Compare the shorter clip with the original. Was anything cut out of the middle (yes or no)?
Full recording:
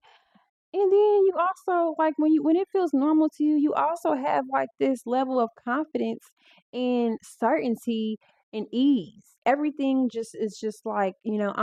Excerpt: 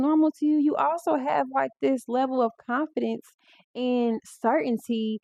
no